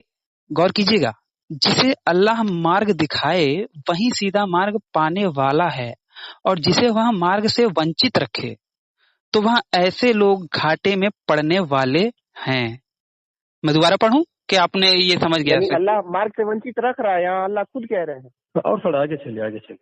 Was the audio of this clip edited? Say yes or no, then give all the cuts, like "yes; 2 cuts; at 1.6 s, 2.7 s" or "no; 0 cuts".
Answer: no; 0 cuts